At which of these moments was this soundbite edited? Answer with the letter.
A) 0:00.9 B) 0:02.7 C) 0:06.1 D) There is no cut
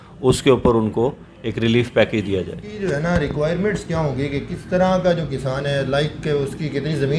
B